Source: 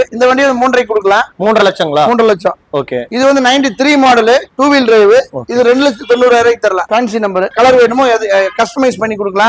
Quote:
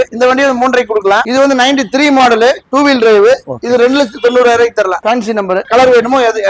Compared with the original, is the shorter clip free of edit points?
no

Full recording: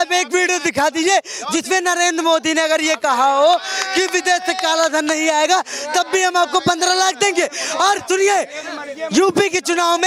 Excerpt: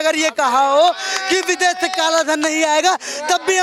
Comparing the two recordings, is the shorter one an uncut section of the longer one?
yes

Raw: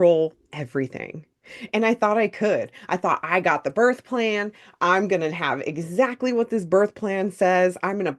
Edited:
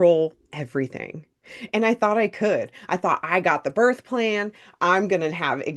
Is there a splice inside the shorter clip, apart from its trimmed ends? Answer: no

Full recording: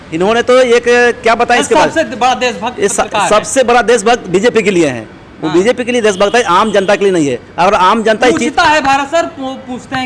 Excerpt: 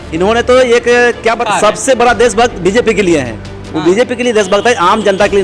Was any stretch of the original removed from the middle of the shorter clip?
yes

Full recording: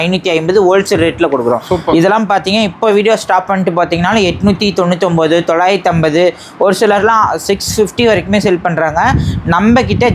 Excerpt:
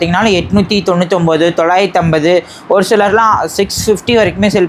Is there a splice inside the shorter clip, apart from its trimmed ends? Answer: no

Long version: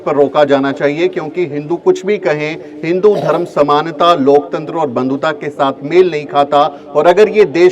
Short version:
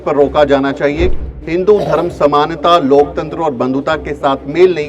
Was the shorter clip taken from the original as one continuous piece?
no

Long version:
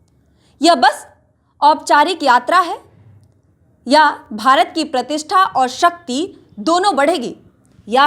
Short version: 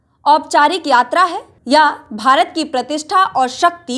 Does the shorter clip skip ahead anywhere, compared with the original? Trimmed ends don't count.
yes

